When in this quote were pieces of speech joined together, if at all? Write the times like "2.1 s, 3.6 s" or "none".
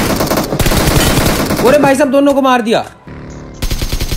3.1 s

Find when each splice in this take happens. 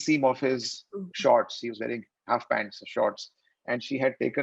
none

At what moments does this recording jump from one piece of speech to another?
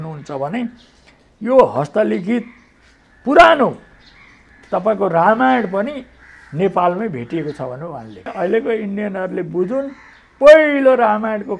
8.3 s

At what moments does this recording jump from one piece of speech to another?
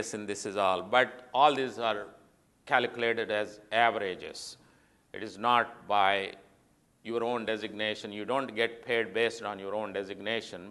none

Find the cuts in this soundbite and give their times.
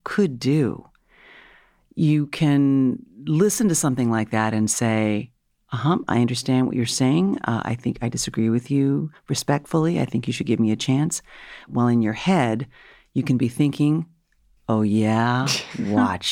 11.7 s

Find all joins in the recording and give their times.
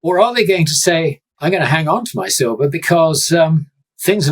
1.3 s

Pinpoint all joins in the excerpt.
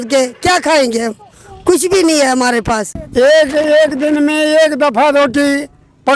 2.9 s

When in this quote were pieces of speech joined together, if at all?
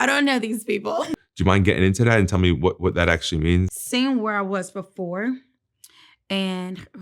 1.1 s, 3.8 s

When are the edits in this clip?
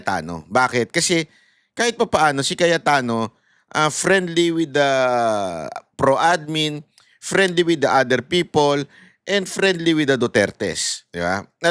none

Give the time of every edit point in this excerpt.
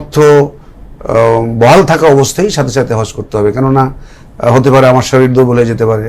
none

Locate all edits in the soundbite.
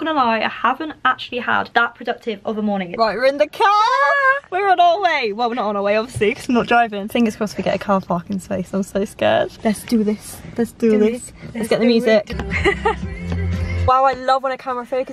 1.7 s, 2.9 s, 7.0 s, 9.5 s, 12.3 s, 13.9 s

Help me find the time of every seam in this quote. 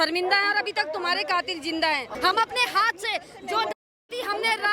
2.1 s

